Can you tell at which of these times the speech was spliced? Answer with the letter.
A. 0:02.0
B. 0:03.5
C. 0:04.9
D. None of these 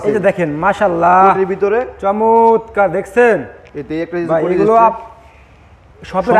D